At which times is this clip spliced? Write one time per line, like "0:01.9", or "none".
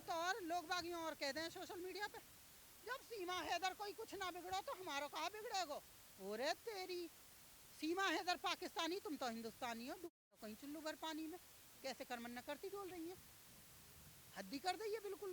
none